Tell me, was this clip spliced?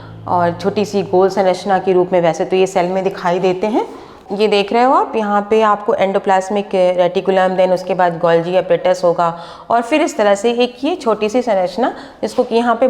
yes; 1 cut; at 4.2 s

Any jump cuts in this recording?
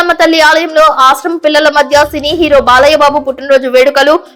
no; 0 cuts

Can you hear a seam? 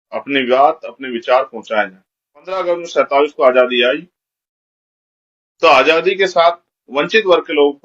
yes; 1 cut; at 2.6 s

